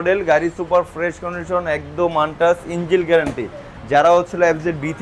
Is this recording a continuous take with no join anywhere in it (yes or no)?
yes